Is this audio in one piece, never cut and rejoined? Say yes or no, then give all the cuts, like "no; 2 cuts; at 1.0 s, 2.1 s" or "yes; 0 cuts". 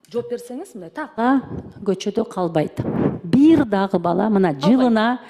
no; 1 cut; at 1.2 s